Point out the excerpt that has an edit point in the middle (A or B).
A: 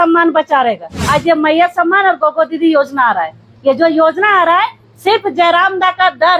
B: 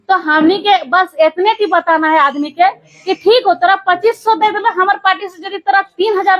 A